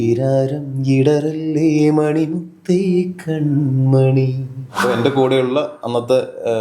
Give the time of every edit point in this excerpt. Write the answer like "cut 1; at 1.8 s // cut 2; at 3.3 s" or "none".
cut 1; at 4.7 s